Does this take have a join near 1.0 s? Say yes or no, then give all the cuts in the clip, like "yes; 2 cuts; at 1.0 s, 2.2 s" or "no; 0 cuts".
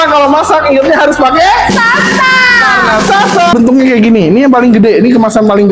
no; 1 cut; at 3.5 s